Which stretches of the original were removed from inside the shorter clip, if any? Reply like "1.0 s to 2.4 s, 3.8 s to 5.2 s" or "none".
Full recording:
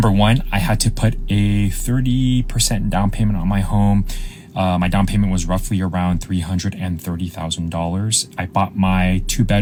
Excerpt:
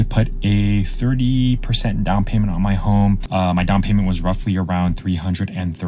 4.1 s to 4.5 s